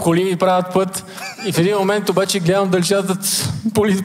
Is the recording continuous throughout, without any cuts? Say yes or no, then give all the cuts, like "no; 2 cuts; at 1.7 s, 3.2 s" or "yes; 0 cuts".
yes; 0 cuts